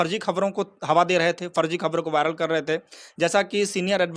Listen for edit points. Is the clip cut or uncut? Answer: uncut